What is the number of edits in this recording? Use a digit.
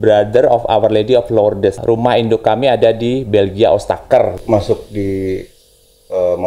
2